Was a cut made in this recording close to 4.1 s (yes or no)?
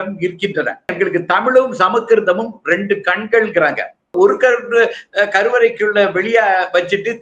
yes